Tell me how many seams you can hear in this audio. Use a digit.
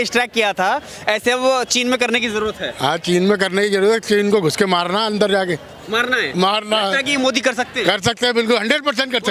0